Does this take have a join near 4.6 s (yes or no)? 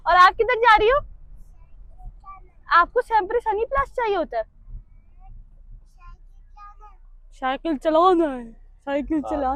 no